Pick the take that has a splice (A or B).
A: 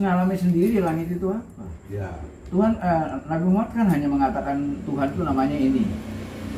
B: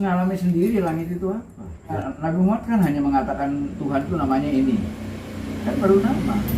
B